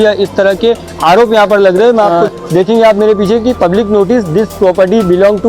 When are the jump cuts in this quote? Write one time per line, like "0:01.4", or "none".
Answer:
0:02.2